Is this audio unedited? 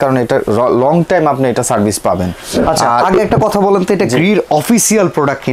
yes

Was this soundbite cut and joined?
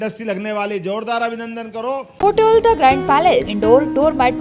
yes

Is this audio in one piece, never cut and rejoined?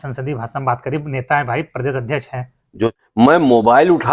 no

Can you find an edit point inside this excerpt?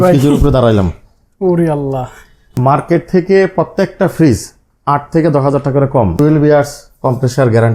yes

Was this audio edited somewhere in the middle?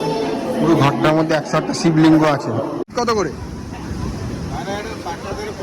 yes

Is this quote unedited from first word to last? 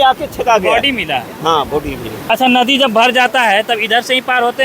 no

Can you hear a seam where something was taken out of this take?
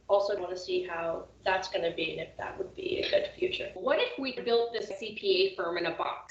yes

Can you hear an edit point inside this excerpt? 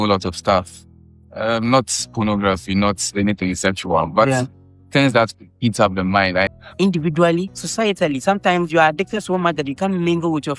yes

